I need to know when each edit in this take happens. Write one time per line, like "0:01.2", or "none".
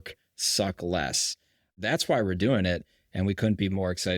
0:01.7